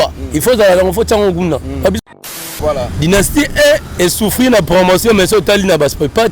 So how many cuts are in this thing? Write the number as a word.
one